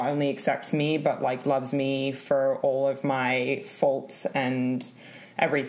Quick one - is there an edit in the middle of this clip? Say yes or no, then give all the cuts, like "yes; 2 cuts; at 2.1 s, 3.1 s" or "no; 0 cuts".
no; 0 cuts